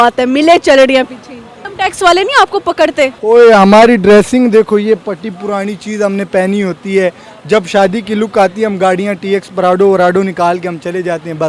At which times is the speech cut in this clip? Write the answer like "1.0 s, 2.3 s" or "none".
1.6 s, 3.2 s